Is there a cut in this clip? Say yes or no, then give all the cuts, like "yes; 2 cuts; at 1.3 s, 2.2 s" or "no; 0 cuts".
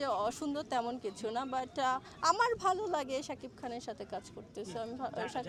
no; 0 cuts